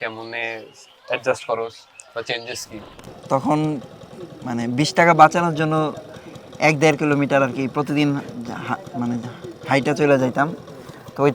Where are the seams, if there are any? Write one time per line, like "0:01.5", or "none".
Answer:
0:03.1